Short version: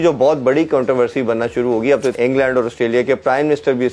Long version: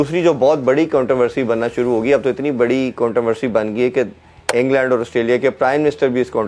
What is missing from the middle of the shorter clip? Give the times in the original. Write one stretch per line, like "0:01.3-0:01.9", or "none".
0:02.4-0:04.5